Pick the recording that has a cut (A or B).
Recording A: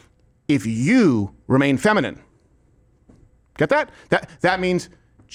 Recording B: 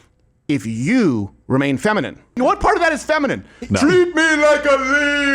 B